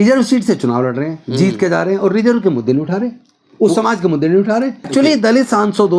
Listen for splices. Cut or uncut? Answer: cut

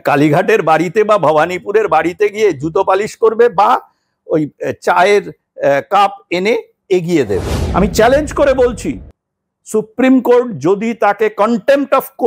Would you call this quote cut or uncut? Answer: cut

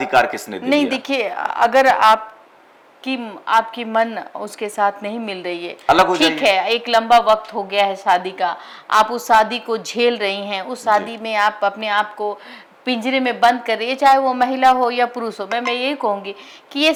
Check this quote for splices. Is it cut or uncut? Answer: uncut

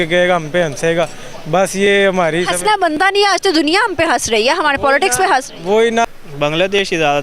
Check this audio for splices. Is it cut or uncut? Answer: cut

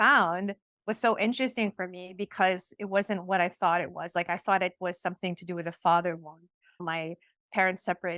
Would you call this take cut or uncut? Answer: cut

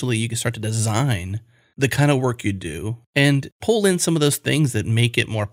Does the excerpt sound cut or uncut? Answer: cut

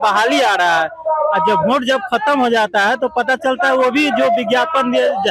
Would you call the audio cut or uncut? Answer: uncut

